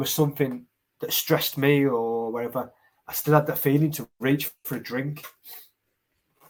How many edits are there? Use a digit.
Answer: 0